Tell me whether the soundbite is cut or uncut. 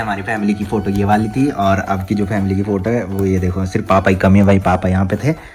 uncut